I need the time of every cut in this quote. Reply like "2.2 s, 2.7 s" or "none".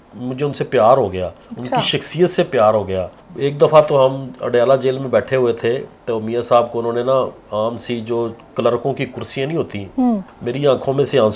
10.2 s